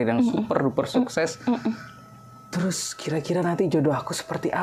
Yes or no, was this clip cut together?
no